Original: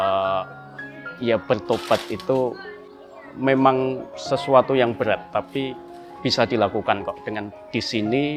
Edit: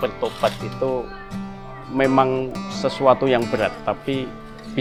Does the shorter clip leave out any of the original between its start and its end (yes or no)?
no